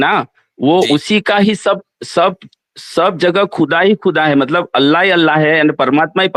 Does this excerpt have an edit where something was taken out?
no; 0 cuts

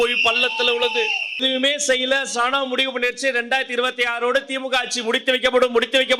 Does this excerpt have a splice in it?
yes; 1 cut; at 1.4 s

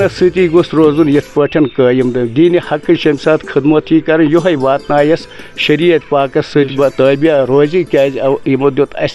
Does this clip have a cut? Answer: no; 0 cuts

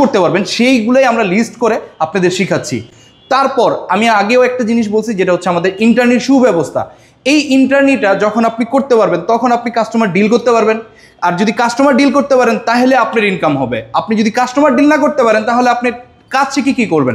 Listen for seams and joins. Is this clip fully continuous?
yes; 0 cuts

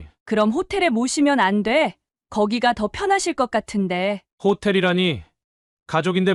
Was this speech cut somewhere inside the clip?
no; 0 cuts

